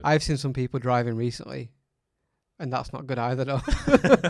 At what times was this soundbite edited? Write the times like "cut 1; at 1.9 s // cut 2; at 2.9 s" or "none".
none